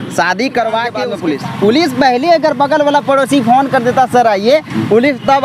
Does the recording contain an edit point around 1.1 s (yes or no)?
yes